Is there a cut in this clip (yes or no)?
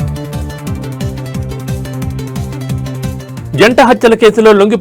yes